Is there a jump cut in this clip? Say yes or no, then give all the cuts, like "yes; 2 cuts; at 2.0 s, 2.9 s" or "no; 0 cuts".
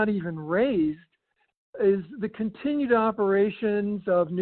no; 0 cuts